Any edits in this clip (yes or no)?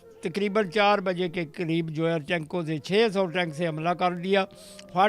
no